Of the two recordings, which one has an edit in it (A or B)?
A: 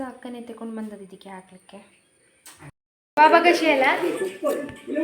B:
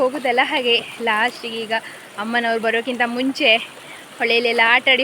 A